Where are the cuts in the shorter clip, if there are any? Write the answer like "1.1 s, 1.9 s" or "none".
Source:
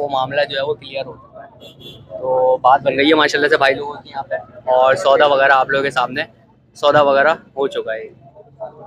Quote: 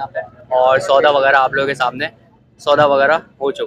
none